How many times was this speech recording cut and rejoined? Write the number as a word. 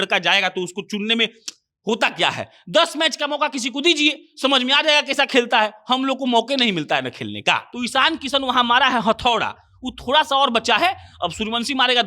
one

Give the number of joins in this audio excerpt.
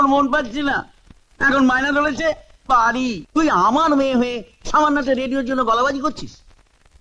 one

